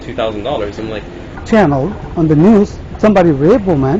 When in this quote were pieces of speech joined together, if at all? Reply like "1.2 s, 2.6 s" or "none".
1.3 s